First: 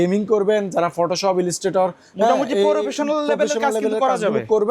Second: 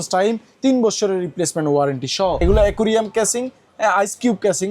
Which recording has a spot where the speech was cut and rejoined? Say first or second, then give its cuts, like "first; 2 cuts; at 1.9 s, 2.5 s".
second; 1 cut; at 2.4 s